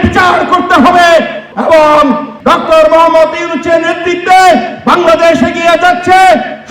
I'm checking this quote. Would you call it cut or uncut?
cut